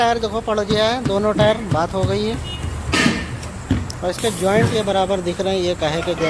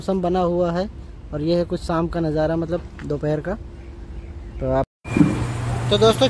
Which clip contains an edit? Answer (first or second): second